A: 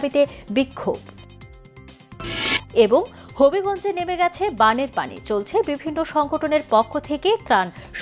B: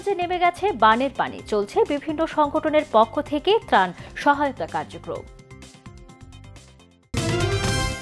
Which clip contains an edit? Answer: B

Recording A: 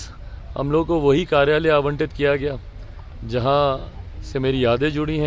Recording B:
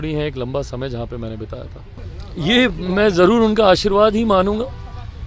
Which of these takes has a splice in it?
B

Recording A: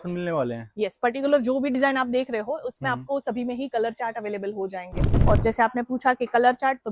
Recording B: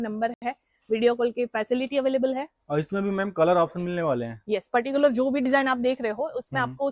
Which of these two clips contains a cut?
A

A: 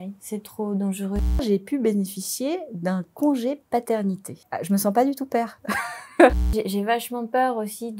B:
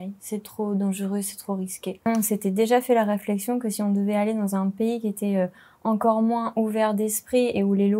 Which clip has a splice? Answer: A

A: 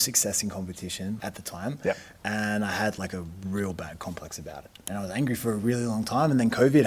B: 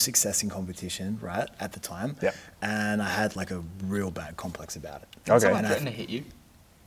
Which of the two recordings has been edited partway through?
A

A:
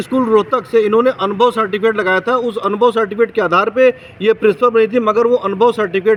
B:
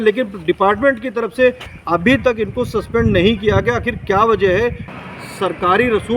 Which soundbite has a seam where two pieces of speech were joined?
B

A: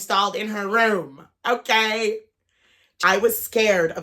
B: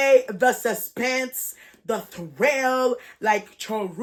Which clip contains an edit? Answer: A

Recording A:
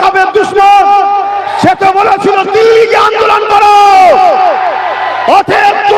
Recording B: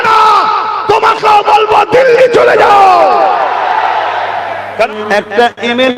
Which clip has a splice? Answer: B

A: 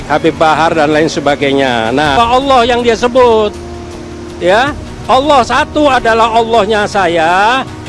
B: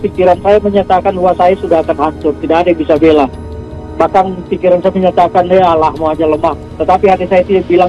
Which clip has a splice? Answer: A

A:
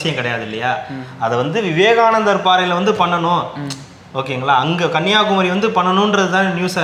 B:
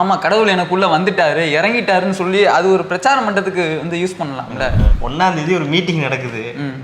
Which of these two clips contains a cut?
B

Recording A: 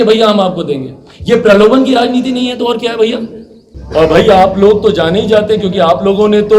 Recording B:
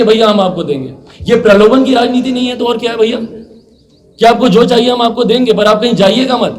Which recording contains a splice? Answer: A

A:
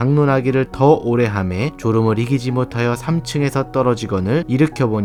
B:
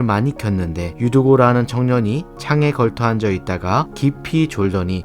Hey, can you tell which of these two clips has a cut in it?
B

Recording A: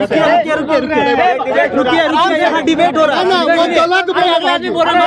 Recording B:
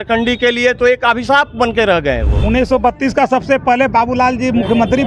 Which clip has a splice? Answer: B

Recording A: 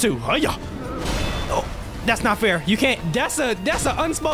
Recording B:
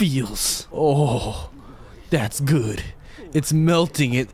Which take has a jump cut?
A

